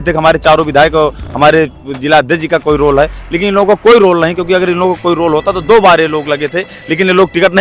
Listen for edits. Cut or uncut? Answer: uncut